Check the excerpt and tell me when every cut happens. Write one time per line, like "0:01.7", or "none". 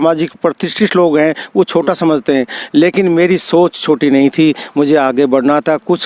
none